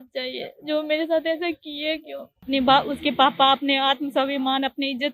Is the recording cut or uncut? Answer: cut